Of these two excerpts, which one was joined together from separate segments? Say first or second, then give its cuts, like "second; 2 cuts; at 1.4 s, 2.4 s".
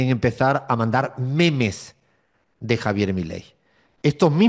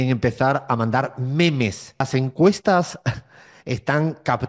second; 1 cut; at 2.0 s